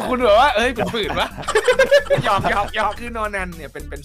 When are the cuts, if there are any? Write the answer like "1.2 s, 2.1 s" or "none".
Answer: none

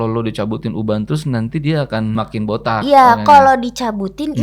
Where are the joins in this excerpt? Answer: 2.2 s

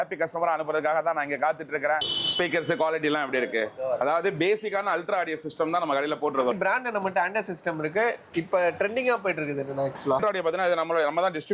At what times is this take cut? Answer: 2.1 s, 6.5 s, 10.0 s

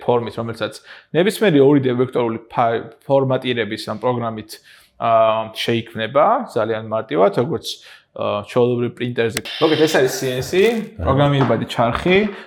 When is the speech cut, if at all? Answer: 9.4 s

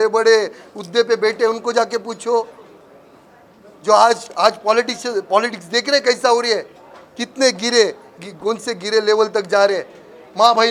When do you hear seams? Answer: none

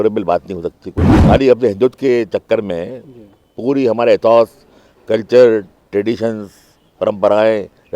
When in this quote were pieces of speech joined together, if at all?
1.1 s

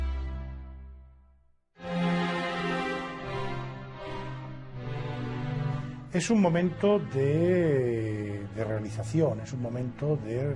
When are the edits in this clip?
6.0 s

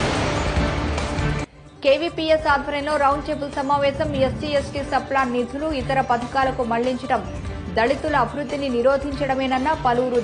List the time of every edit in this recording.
1.4 s

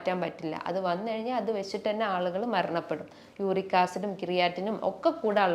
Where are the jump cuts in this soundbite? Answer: 3.2 s

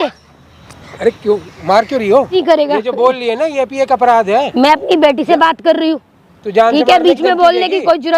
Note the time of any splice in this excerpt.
2.3 s

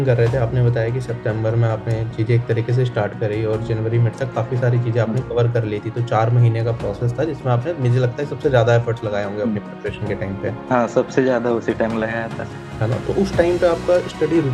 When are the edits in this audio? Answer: none

